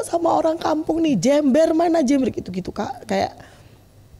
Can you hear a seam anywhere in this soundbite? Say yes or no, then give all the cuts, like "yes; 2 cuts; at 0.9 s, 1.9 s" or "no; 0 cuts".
no; 0 cuts